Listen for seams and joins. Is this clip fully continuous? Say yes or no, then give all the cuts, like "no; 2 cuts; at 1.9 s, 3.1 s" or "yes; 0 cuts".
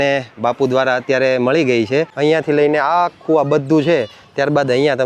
no; 1 cut; at 2.1 s